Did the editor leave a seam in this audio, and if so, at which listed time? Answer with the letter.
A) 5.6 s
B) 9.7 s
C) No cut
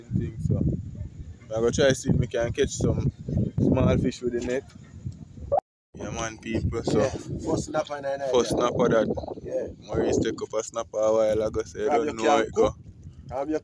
A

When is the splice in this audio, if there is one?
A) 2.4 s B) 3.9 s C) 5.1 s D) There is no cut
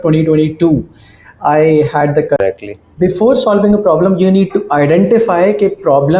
A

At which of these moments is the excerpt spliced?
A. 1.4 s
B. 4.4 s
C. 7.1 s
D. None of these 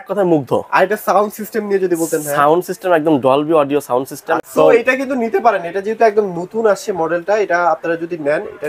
B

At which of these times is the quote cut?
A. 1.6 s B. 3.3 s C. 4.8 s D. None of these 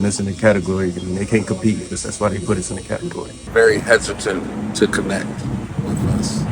B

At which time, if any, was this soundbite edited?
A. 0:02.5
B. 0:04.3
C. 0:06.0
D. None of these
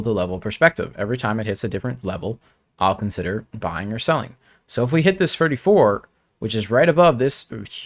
D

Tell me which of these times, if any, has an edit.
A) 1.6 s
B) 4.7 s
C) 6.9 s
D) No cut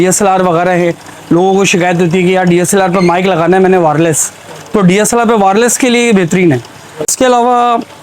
C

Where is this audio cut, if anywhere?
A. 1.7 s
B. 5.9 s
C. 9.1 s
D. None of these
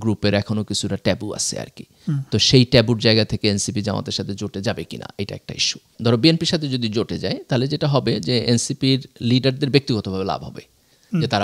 B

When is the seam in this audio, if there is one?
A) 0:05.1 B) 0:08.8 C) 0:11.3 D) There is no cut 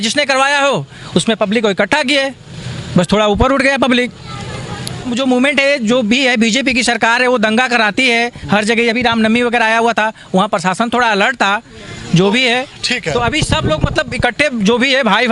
A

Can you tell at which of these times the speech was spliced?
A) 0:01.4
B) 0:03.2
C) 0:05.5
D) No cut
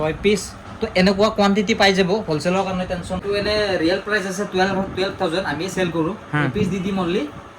B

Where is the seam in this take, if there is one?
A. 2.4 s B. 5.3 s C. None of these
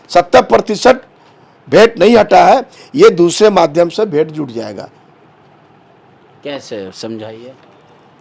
C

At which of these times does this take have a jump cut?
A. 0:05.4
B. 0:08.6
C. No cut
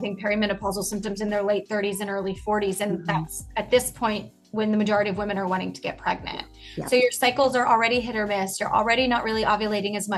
C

